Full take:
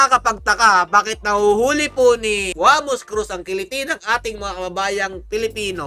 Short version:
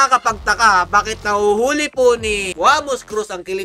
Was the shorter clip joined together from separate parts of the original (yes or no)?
no